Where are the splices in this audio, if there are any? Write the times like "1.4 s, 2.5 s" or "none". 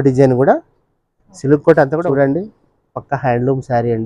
1.9 s